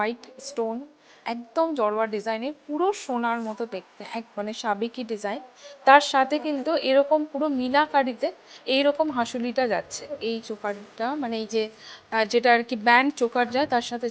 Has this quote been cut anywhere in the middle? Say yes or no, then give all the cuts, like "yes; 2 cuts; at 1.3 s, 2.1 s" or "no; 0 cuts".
yes; 2 cuts; at 4.3 s, 10.2 s